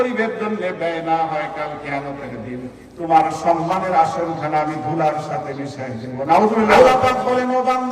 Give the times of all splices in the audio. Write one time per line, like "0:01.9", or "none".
0:06.8